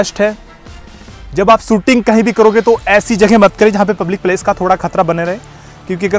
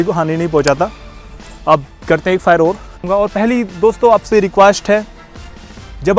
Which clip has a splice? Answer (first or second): second